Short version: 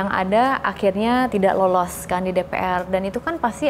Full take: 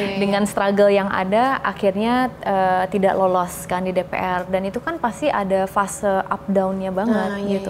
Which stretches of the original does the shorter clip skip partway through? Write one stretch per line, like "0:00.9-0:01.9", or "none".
0:02.3-0:02.9

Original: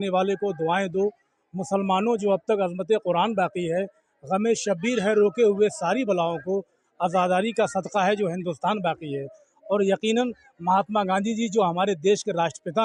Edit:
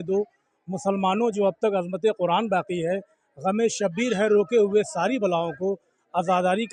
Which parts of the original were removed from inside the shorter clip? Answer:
none

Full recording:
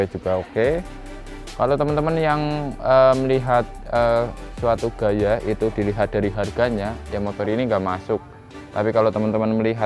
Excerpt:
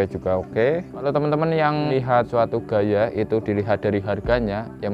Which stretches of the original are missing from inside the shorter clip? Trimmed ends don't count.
0:01.0-0:01.7
0:02.7-0:04.4

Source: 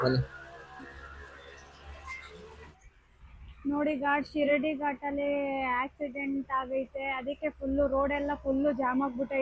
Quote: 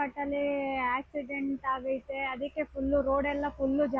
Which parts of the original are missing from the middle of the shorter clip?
none

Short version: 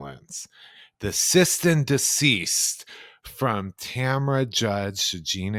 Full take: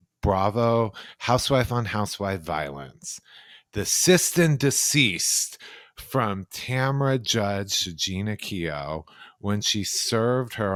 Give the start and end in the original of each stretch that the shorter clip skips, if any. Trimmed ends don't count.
none

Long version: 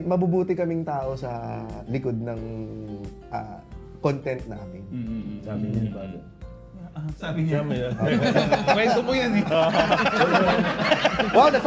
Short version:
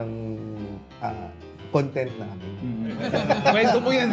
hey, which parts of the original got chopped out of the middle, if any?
0:05.4-0:08.3

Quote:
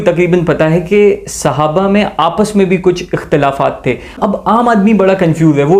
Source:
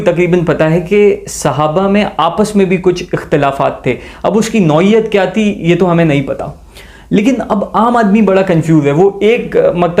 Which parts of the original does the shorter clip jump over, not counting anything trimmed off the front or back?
0:04.1-0:07.4

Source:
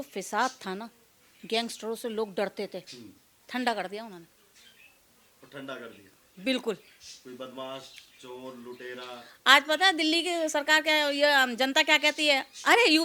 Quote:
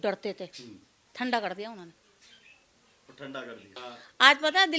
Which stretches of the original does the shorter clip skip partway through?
0:06.1-0:09.0

